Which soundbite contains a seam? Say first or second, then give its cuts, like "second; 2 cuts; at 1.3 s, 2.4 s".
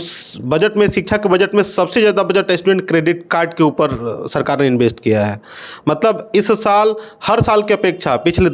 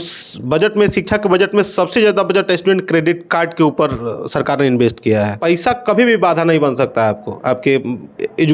second; 1 cut; at 5.4 s